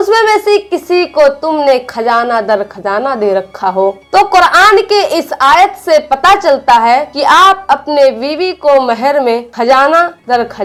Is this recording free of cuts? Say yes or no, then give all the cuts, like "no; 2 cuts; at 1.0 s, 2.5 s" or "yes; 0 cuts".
yes; 0 cuts